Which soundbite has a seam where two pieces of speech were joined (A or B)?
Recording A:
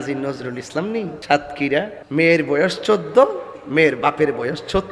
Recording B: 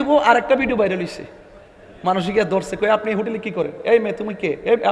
A